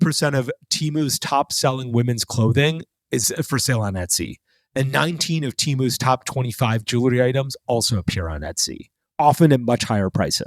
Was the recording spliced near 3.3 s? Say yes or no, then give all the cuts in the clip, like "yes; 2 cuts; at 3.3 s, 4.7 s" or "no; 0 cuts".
yes; 1 cut; at 3.3 s